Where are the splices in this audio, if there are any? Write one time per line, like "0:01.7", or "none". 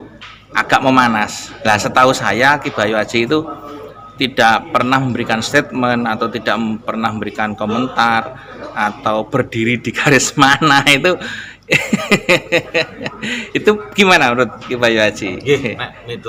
none